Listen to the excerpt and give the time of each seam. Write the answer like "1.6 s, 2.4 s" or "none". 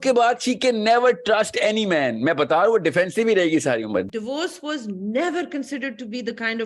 4.0 s